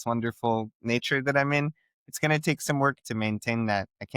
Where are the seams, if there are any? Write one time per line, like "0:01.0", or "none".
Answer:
none

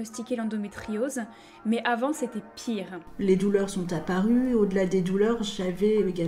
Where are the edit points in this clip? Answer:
0:03.1

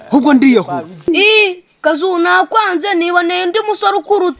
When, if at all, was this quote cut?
0:01.1

